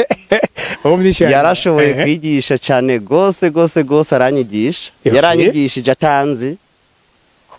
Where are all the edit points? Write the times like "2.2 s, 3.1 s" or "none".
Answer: none